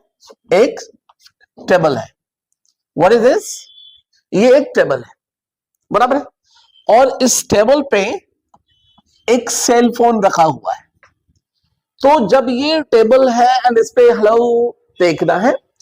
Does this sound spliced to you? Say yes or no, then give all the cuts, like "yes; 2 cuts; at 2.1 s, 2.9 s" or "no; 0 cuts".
no; 0 cuts